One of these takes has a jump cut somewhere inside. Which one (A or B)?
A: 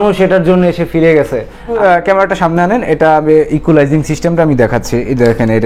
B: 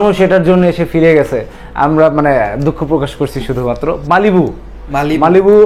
A